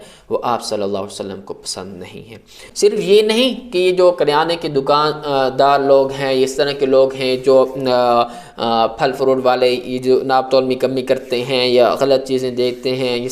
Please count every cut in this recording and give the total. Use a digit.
1